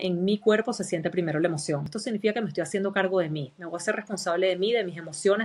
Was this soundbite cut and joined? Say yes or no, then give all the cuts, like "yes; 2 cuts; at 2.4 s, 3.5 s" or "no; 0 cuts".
yes; 1 cut; at 1.9 s